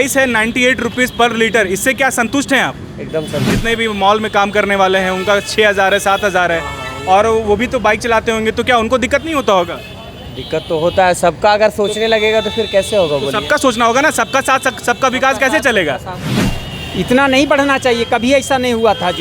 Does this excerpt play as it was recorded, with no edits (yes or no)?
no